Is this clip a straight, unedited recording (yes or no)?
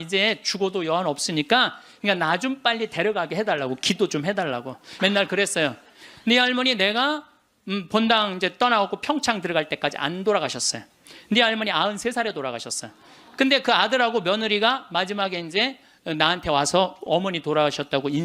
no